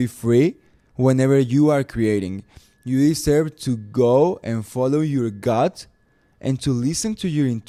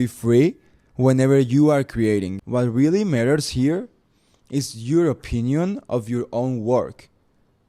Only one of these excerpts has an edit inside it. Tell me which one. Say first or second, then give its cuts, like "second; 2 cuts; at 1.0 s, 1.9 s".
second; 1 cut; at 2.4 s